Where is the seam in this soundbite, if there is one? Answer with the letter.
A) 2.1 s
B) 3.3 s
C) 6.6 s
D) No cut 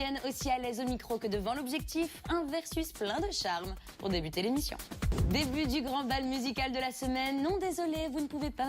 A